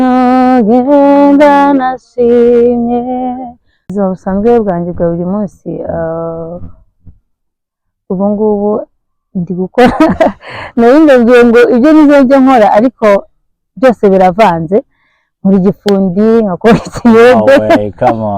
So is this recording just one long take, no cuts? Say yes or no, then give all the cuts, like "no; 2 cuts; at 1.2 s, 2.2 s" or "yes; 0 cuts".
no; 1 cut; at 3.9 s